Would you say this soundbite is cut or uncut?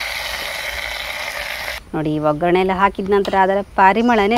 cut